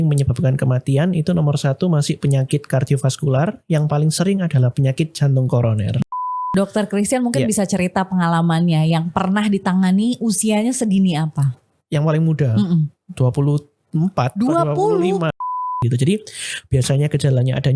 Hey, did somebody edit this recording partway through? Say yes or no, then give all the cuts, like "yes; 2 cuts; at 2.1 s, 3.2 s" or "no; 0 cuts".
yes; 2 cuts; at 6.1 s, 15.6 s